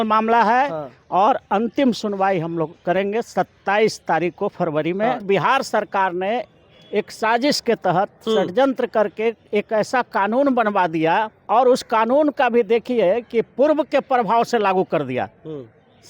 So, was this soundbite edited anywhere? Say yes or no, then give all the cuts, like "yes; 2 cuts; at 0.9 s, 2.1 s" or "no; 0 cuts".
yes; 2 cuts; at 5.2 s, 11.4 s